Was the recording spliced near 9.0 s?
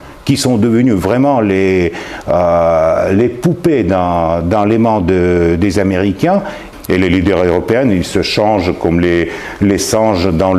no; 1 cut; at 6.6 s

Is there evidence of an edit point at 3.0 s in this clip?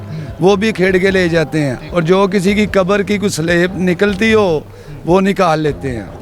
no; 1 cut; at 1.8 s

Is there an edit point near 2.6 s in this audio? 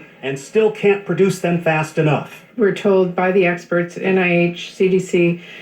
yes; 2 cuts; at 0.9 s, 2.6 s

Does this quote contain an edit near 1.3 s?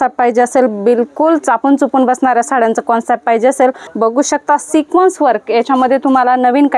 no; 1 cut; at 3.8 s

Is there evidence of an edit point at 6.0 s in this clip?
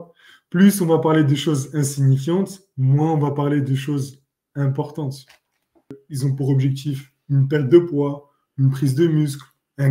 yes; 1 cut; at 6.0 s

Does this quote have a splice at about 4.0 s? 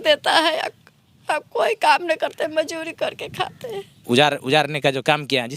yes; 1 cut; at 4.0 s

